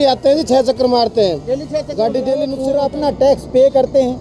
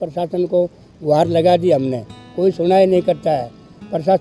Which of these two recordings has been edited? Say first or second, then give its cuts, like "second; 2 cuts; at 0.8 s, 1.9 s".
first; 1 cut; at 2.5 s